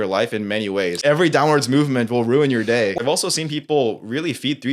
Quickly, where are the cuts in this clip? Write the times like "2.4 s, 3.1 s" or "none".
1.0 s, 3.0 s

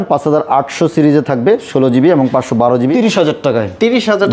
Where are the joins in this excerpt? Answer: 3.0 s

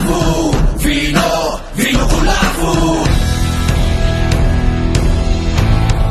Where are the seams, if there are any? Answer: none

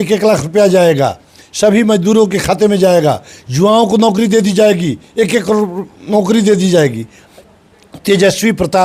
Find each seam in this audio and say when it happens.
7.2 s

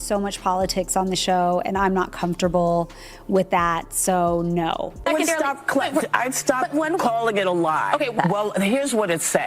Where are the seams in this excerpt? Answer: 4.9 s

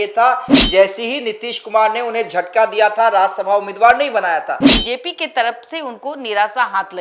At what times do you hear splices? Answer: 4.7 s

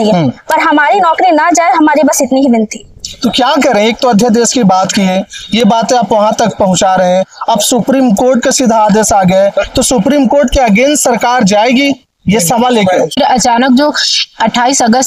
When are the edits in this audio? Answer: 13.1 s

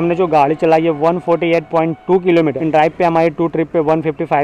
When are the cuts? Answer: 2.5 s

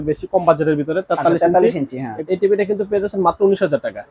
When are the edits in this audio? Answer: 2.2 s

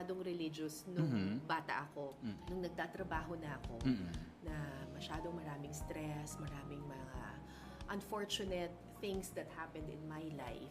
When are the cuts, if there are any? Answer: 2.4 s

